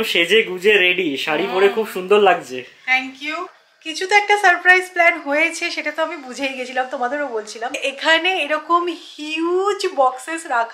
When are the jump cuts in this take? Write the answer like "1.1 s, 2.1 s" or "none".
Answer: 3.8 s, 7.8 s